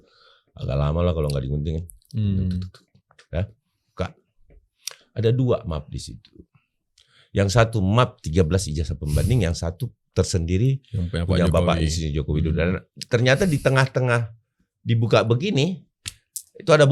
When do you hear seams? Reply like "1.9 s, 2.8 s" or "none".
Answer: none